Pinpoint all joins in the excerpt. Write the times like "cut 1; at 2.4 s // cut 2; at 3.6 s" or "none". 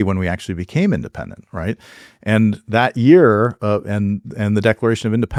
none